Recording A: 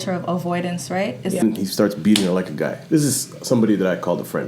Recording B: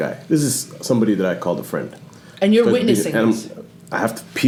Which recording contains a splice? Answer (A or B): A